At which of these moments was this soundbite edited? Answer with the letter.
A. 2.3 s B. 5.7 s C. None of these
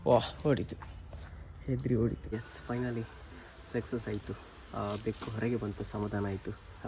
A